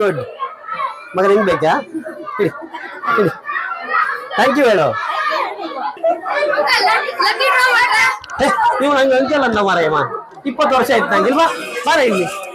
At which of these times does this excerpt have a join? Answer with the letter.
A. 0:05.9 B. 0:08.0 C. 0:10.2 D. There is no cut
A